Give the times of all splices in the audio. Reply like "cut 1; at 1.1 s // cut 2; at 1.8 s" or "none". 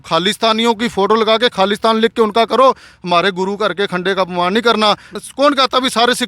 cut 1; at 5.1 s